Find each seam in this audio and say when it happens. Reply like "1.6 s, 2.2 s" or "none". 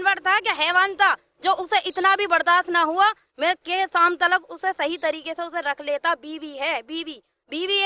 none